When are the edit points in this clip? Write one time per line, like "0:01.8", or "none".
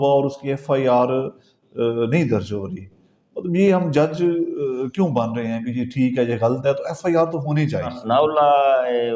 0:07.9